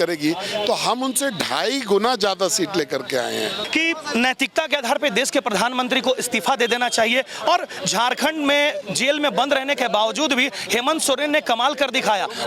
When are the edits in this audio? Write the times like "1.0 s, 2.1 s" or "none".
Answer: 3.6 s